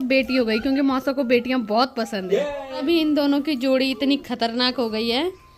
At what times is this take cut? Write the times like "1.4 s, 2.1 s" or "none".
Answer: none

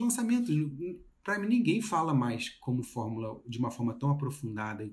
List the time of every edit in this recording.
none

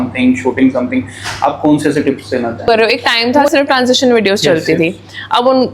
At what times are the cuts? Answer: 2.7 s

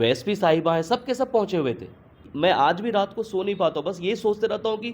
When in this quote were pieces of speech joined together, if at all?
2.2 s

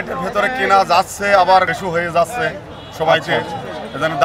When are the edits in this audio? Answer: 1.8 s

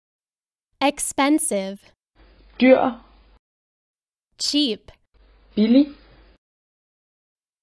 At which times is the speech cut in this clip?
1.4 s

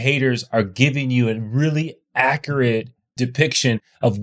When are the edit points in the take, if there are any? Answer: 3.1 s

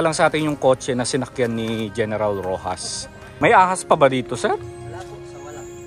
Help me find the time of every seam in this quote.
3.3 s

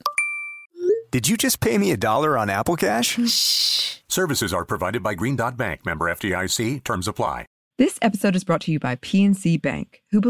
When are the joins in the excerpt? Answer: 7.6 s

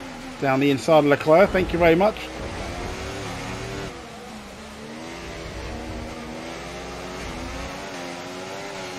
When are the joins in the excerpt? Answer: none

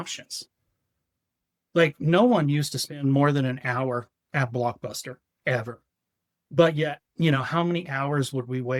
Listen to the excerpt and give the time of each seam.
none

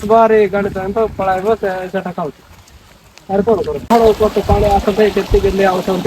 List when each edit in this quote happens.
3.9 s

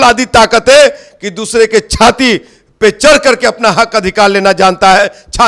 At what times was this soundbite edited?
none

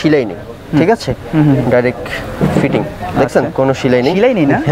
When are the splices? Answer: none

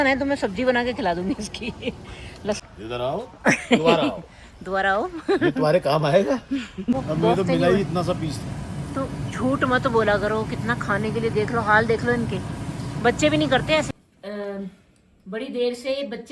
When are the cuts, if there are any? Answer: 2.6 s, 7.0 s, 14.6 s

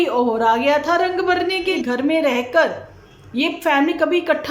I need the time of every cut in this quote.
1.8 s

